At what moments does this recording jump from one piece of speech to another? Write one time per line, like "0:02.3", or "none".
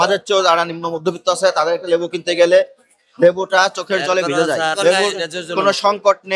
0:04.8

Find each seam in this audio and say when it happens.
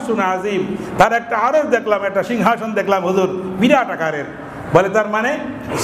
none

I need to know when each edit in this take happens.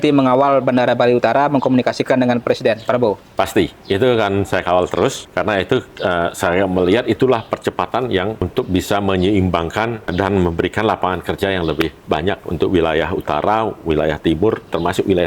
0:05.2
0:08.4
0:10.1
0:12.0

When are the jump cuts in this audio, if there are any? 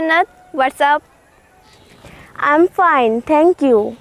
0:01.7

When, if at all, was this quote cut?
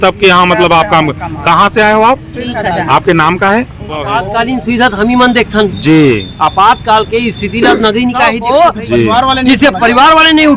0:04.2
0:08.4

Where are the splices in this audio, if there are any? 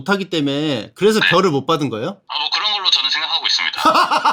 none

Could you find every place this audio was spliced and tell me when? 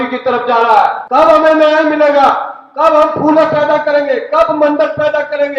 0:01.0

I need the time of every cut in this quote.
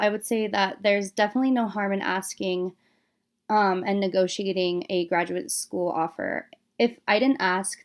none

